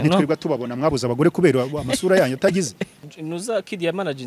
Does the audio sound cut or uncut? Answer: cut